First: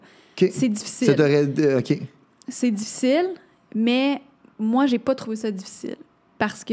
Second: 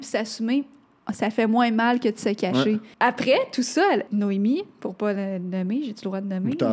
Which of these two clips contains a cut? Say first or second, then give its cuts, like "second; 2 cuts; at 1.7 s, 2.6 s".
second; 2 cuts; at 2.9 s, 4.1 s